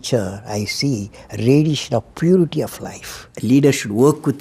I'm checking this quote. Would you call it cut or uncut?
cut